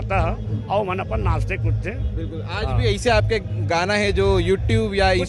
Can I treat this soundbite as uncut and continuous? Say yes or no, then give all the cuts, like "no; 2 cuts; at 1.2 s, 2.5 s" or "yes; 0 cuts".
yes; 0 cuts